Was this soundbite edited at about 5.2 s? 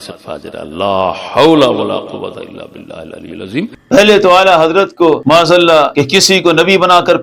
yes; 3 cuts; at 3.7 s, 5.2 s, 5.9 s

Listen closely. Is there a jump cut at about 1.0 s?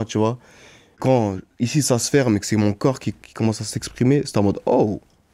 yes; 1 cut; at 1.0 s

